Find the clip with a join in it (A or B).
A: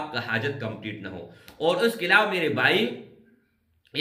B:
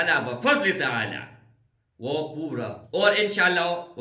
B